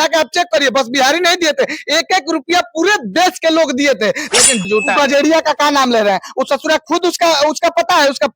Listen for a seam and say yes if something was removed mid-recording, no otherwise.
yes